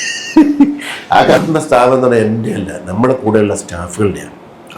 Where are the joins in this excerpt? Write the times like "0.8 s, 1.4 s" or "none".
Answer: 1.4 s